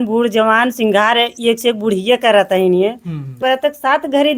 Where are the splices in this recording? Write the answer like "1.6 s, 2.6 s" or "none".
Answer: 3.4 s